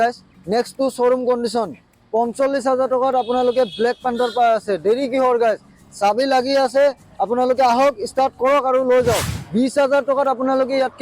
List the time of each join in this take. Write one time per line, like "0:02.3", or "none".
0:09.4